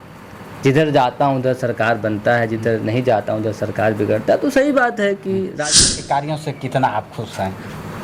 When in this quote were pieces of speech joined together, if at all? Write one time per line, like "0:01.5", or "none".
0:05.5